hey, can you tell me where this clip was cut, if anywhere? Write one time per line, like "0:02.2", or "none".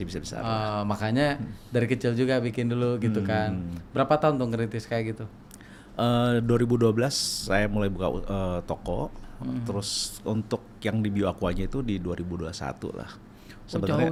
none